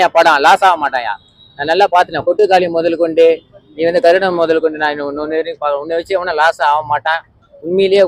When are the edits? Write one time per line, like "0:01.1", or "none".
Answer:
none